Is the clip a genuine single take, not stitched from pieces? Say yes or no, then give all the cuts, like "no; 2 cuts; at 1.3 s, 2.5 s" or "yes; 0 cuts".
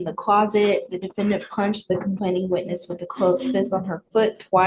yes; 0 cuts